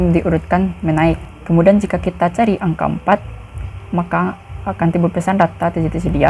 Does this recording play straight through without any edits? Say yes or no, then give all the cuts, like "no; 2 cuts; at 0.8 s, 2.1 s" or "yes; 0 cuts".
no; 1 cut; at 1.3 s